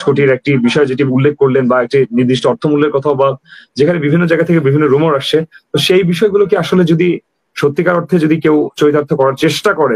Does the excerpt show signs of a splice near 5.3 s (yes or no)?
no